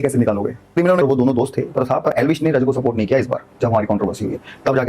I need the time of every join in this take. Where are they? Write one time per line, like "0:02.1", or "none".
0:01.0